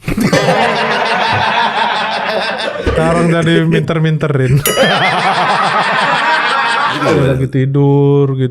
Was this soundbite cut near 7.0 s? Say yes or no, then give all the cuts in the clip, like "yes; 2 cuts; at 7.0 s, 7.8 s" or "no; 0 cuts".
yes; 1 cut; at 7.0 s